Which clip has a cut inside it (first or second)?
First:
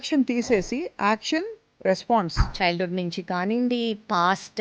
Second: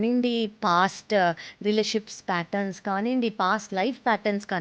first